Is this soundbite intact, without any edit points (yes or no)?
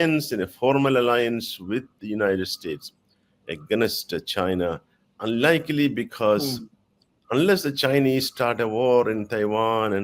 yes